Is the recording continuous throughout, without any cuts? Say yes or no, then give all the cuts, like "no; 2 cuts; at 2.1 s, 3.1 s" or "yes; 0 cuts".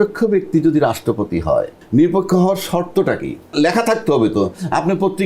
no; 2 cuts; at 1.8 s, 3.5 s